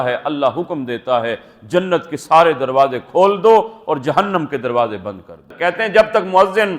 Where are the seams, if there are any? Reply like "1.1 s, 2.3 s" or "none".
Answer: 5.5 s